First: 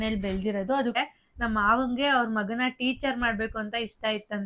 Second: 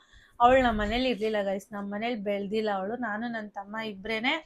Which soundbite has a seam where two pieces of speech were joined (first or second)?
first